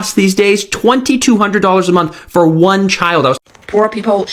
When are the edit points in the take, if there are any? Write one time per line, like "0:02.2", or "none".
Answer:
0:03.4